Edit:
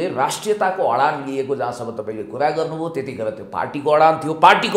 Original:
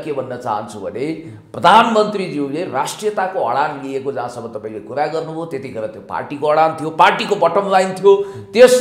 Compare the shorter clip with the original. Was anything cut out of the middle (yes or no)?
no